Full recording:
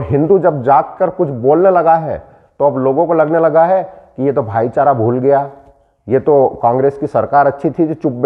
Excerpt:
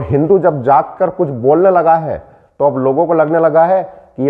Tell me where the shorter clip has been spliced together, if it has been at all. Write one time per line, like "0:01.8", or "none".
none